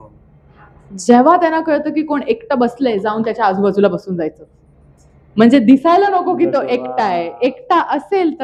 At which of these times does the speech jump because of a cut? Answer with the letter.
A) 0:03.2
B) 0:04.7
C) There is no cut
C